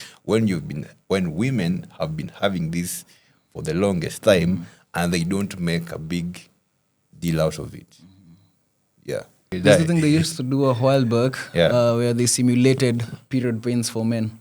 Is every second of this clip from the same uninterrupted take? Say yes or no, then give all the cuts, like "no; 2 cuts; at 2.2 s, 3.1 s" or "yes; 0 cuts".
no; 1 cut; at 9.5 s